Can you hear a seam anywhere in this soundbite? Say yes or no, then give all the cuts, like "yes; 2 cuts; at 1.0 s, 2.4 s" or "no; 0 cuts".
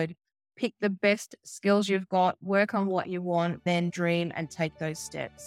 yes; 1 cut; at 3.8 s